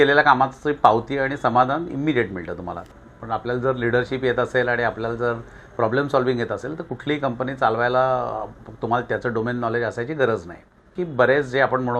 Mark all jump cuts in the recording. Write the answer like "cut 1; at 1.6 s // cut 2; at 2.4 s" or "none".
cut 1; at 2.8 s // cut 2; at 10.9 s